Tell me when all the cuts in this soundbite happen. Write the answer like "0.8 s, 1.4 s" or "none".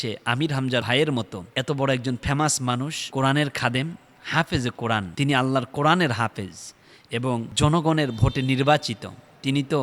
0.9 s, 1.4 s, 3.0 s, 5.1 s, 7.5 s